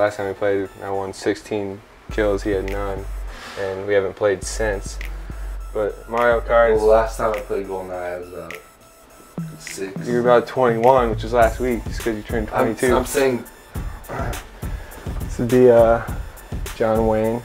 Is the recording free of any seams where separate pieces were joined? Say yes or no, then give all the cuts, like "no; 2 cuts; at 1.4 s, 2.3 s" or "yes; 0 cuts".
no; 1 cut; at 4.7 s